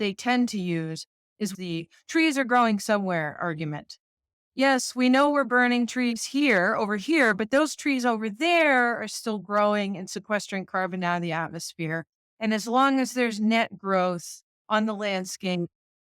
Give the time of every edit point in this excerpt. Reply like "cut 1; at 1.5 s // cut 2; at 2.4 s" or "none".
cut 1; at 1.5 s